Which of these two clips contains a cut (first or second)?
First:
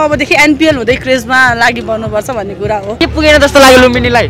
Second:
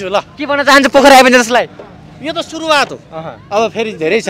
first